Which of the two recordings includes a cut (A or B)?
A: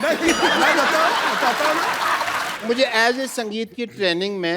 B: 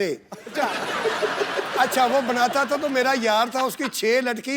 A